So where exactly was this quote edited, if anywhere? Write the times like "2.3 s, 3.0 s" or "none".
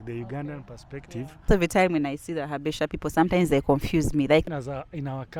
1.5 s, 4.5 s